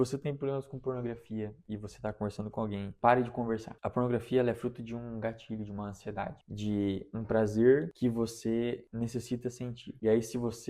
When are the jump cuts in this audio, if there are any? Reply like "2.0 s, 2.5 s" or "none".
none